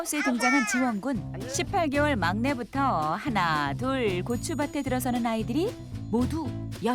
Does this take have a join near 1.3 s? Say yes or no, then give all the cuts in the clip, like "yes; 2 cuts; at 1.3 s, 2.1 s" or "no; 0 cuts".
yes; 1 cut; at 1.3 s